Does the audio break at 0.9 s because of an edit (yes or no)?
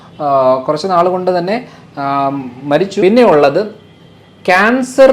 no